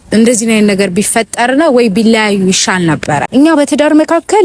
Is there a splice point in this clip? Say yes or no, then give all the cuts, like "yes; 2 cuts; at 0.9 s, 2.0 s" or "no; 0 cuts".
yes; 1 cut; at 3.2 s